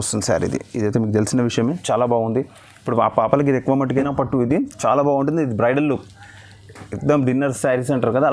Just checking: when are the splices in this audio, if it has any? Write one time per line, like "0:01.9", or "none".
0:04.0